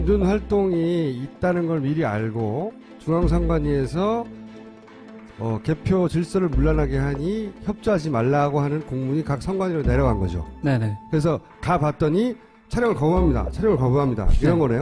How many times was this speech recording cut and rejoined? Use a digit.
1